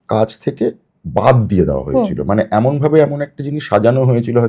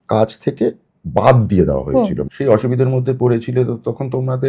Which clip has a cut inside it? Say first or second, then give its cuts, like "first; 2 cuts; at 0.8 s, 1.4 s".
second; 1 cut; at 2.2 s